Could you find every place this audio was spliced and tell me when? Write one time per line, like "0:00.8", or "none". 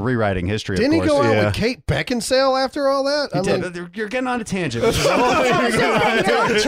none